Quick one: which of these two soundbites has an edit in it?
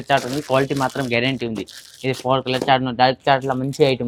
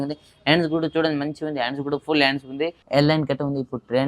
second; 1 cut; at 2.8 s

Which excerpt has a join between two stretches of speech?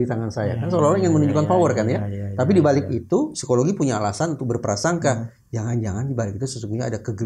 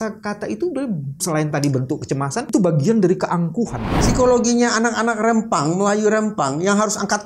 second; 3 cuts; at 1.1 s, 2.5 s, 3.9 s

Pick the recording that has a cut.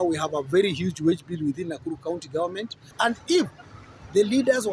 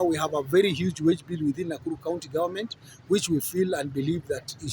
first; 1 cut; at 2.9 s

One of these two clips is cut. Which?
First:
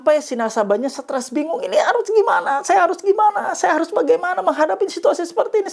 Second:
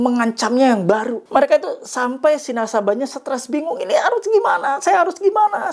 second; 1 cut; at 1.2 s

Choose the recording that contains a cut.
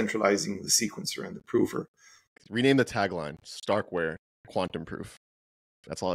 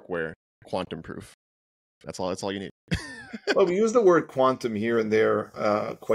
first; 1 cut; at 2.4 s

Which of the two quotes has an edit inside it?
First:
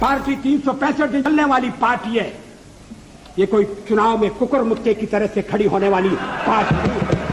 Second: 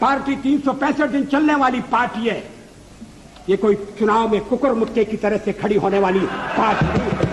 first; 1 cut; at 1.3 s

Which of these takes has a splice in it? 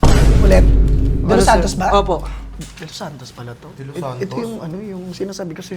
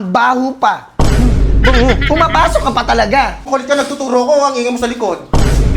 second; 1 cut; at 3.4 s

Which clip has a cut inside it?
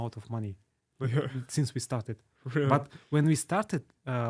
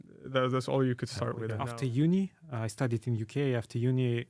second; 1 cut; at 1.6 s

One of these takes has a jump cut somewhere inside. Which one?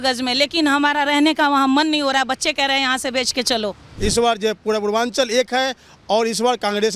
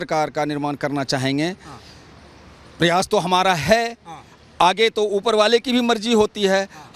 first; 1 cut; at 3.9 s

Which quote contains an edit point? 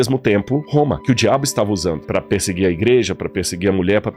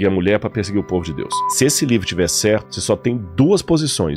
second; 2 cuts; at 1.5 s, 2.7 s

